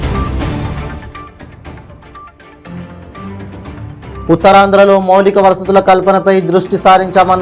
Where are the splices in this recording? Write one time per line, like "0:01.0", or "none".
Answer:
0:04.1

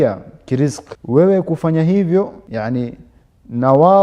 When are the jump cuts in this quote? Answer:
0:00.9
0:02.4

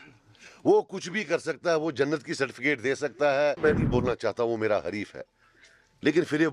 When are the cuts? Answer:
0:03.6

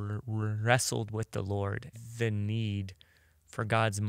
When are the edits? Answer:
0:01.9

